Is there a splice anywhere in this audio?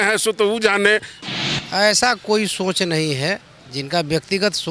yes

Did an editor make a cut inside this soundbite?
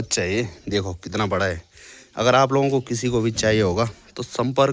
no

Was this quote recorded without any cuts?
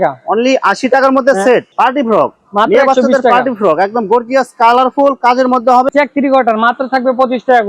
no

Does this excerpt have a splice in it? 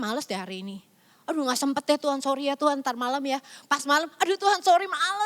no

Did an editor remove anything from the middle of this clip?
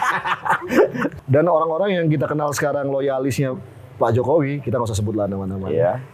yes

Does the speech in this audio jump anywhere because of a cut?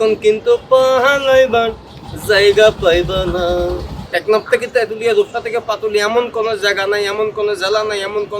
yes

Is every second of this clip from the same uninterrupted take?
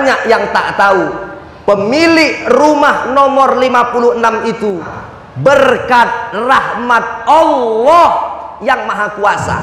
no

